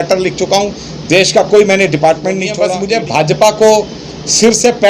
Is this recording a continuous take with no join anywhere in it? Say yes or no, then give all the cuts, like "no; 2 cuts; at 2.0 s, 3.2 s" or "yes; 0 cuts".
no; 1 cut; at 2.5 s